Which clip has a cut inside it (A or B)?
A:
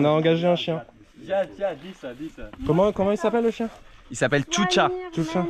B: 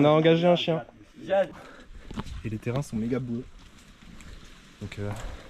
B